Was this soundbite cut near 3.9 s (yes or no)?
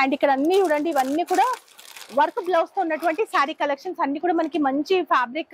no